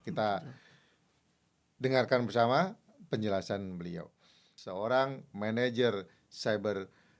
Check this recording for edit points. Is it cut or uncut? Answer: cut